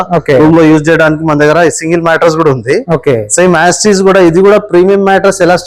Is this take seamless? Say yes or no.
yes